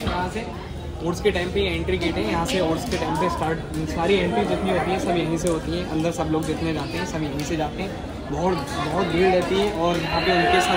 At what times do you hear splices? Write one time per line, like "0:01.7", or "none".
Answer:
none